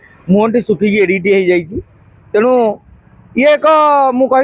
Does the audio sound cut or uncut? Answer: uncut